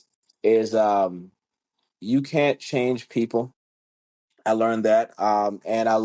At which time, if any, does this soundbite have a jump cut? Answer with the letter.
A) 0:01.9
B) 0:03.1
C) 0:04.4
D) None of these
A